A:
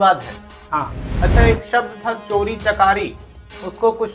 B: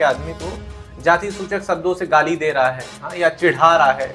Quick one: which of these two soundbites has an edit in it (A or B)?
A